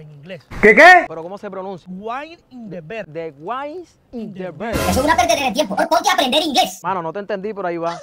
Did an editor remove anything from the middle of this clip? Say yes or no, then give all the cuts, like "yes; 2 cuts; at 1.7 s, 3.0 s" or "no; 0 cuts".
no; 0 cuts